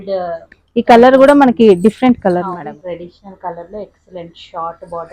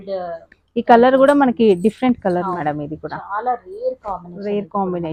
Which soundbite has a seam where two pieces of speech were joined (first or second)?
first